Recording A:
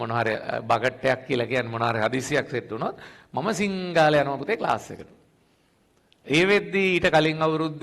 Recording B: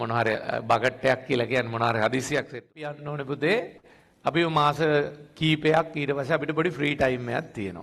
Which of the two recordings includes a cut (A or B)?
B